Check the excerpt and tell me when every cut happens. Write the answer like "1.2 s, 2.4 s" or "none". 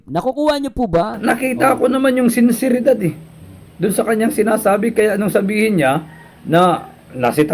1.6 s

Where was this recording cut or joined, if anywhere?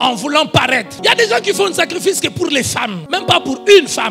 0.9 s, 3.0 s

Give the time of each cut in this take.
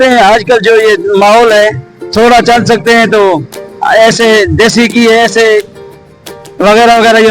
none

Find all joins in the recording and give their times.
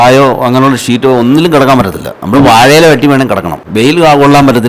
3.6 s

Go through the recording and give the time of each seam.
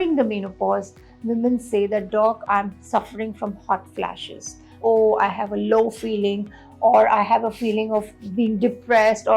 4.8 s

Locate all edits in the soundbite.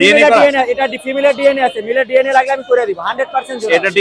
none

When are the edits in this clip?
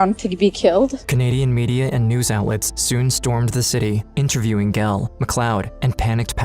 none

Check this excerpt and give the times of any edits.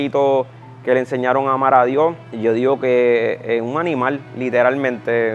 2.3 s

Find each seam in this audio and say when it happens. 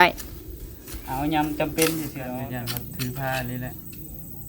2.3 s

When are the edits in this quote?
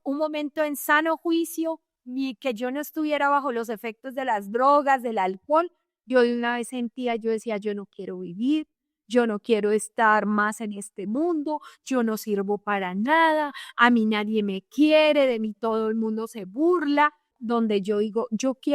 17.3 s

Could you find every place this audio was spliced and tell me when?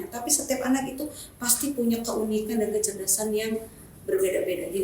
none

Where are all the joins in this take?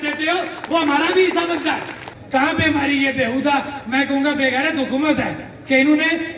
2.1 s

